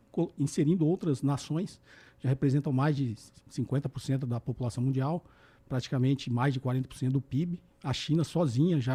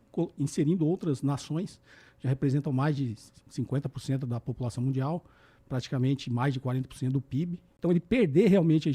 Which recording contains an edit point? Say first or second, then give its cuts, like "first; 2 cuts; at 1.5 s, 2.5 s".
second; 1 cut; at 7.6 s